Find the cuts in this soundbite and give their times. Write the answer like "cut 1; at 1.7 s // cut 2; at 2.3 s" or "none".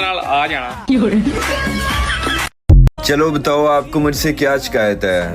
cut 1; at 2.9 s